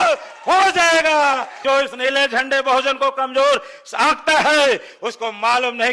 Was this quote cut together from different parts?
yes; 1 cut; at 1.5 s

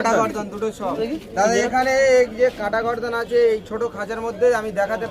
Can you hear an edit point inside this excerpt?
yes; 1 cut; at 1.0 s

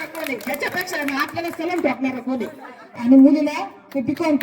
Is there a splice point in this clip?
yes; 1 cut; at 2.8 s

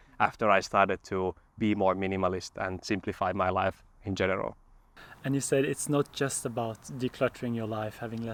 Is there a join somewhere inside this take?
no; 0 cuts

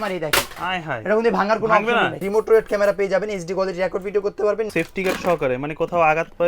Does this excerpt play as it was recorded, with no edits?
no; 2 cuts; at 2.2 s, 4.7 s

